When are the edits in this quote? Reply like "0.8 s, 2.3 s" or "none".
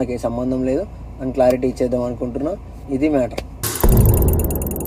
none